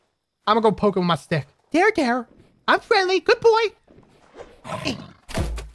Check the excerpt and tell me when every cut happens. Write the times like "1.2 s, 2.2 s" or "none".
1.5 s